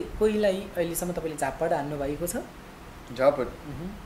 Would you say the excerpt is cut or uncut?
uncut